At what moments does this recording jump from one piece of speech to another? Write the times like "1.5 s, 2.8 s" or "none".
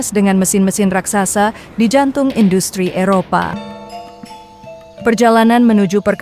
3.5 s